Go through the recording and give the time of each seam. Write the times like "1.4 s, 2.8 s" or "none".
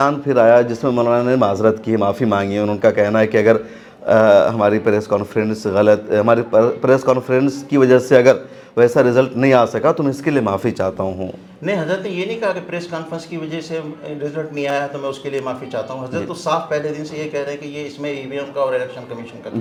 none